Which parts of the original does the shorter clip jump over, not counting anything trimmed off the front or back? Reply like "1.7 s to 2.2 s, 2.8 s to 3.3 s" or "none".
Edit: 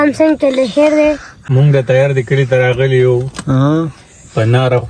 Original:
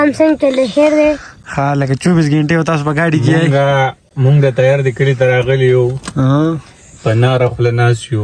1.4 s to 4.1 s